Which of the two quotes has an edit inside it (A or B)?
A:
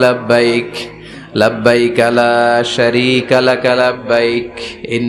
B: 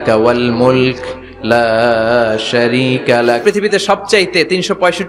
B